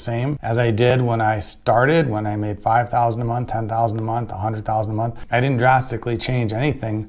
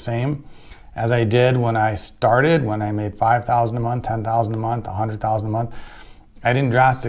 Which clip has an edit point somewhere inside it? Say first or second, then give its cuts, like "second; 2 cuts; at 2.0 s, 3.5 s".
first; 2 cuts; at 0.9 s, 5.2 s